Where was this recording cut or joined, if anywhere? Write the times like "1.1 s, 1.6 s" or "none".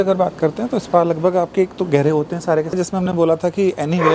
2.8 s